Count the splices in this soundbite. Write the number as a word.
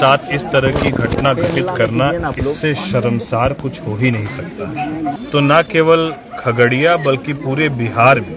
one